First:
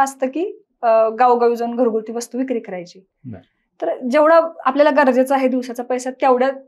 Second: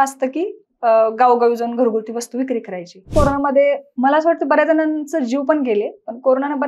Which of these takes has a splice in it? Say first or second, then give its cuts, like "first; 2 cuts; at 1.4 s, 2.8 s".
second; 1 cut; at 3.0 s